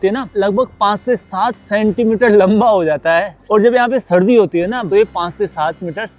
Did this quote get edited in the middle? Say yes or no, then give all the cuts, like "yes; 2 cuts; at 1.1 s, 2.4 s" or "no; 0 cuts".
no; 0 cuts